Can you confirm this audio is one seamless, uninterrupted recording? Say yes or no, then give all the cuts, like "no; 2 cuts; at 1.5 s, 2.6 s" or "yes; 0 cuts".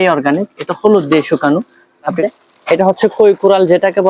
no; 1 cut; at 2.2 s